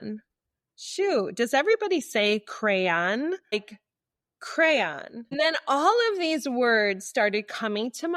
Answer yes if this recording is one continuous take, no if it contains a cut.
no